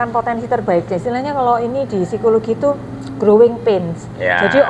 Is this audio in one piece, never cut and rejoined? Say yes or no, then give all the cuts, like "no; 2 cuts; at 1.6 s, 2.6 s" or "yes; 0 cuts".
no; 1 cut; at 1.0 s